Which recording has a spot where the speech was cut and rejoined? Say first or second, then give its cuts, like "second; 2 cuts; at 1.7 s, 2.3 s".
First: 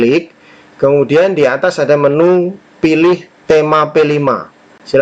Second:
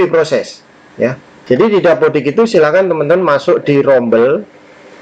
second; 1 cut; at 1.3 s